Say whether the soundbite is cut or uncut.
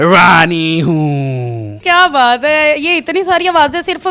uncut